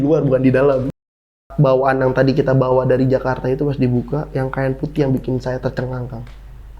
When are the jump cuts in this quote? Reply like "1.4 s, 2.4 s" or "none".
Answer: 1.1 s